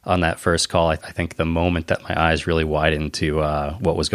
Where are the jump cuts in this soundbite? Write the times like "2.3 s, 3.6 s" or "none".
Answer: 1.0 s